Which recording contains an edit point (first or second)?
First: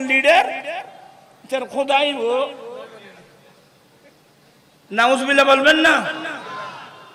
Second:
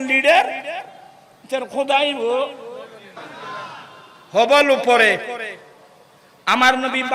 second